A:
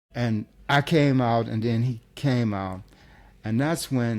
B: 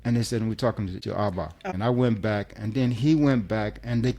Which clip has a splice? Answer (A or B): B